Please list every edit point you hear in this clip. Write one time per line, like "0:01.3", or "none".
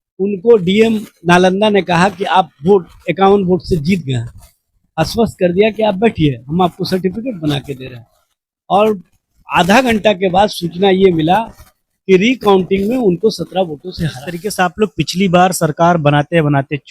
0:14.3